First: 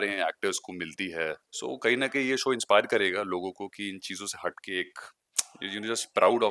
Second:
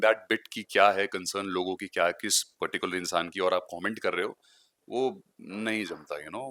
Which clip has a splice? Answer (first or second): first